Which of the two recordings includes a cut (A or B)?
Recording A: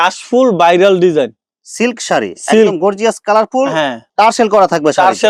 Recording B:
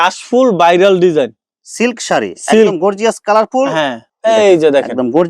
B